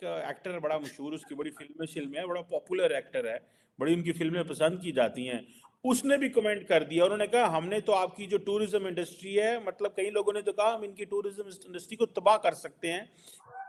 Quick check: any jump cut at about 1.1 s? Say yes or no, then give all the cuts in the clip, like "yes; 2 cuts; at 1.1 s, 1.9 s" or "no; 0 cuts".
no; 0 cuts